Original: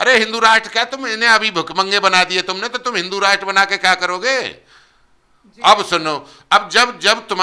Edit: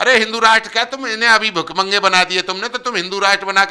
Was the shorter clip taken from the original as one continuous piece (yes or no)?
yes